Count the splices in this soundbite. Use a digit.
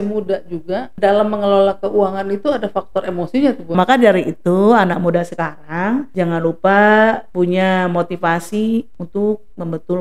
5